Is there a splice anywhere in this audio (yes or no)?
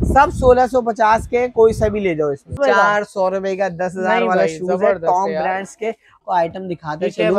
yes